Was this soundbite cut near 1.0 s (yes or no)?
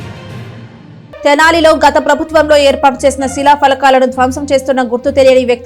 yes